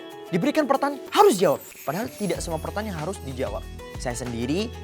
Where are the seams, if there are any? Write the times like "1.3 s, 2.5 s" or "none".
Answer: 3.8 s